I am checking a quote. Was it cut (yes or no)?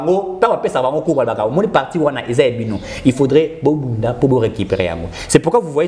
no